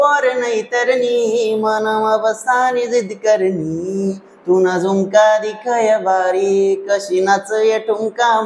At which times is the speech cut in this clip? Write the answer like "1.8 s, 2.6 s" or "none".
none